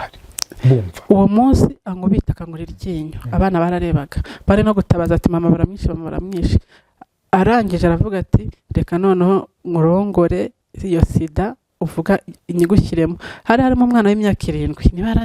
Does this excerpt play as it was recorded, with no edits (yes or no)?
yes